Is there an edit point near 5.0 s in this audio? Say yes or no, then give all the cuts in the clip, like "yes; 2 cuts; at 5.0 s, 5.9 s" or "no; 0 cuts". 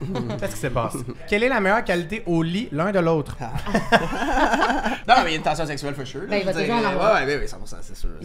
yes; 2 cuts; at 1.1 s, 5.0 s